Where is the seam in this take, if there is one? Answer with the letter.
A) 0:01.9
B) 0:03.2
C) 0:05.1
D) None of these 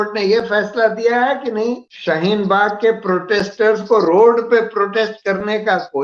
A